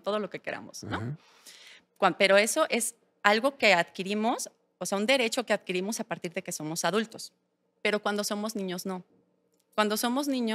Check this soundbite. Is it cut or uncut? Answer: uncut